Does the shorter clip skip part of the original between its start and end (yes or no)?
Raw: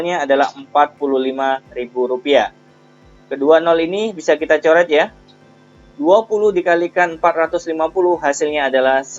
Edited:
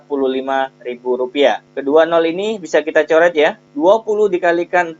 yes